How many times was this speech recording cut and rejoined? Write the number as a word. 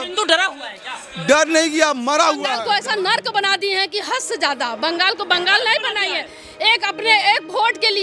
one